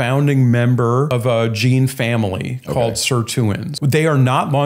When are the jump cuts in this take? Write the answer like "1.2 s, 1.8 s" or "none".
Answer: 1.1 s, 3.7 s